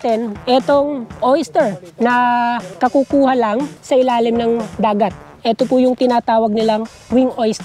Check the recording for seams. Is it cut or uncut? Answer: uncut